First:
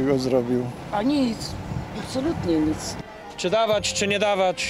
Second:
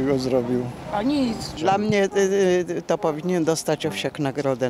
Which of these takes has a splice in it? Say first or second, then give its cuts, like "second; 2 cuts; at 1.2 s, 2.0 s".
second; 1 cut; at 1.5 s